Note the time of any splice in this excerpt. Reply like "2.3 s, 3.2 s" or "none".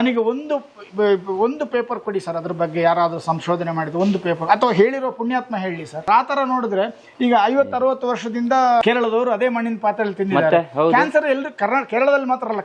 6.0 s, 8.8 s